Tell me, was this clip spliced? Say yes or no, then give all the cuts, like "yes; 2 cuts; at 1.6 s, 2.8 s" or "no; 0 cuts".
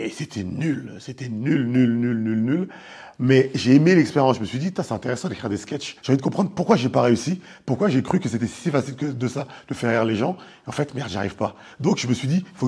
no; 0 cuts